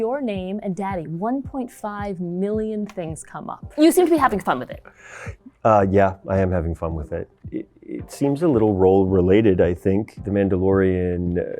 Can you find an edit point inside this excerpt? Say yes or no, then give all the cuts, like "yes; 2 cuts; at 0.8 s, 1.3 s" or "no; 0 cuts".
yes; 3 cuts; at 3.6 s, 7.5 s, 10.1 s